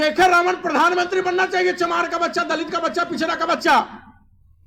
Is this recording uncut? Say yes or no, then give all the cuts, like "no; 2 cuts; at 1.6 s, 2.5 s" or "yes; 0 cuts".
yes; 0 cuts